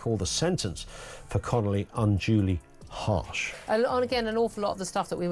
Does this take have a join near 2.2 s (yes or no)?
no